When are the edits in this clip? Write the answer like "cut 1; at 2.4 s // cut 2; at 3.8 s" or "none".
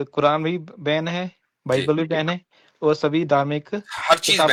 none